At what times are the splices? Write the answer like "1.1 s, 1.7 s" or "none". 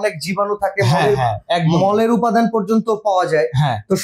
none